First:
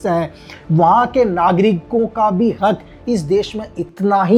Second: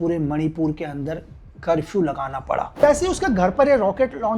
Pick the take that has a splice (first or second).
second